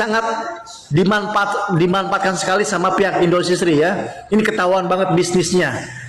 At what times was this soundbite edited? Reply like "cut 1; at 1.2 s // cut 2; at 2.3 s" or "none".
none